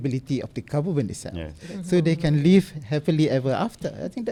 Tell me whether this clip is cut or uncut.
uncut